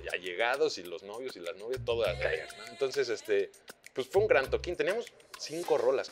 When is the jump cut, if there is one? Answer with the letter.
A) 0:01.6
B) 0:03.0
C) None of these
C